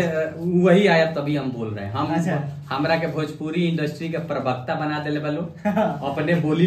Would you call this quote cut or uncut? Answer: uncut